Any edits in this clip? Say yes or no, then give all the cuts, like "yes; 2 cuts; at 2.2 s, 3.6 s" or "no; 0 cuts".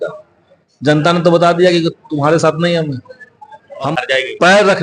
yes; 1 cut; at 3.9 s